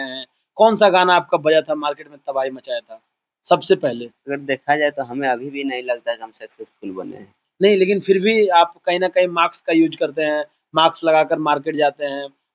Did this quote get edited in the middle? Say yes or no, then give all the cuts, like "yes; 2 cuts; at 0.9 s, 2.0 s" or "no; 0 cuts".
no; 0 cuts